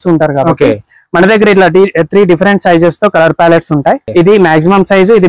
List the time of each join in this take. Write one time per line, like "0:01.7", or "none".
0:04.1